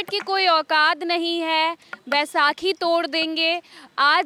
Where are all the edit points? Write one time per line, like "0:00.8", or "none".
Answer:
none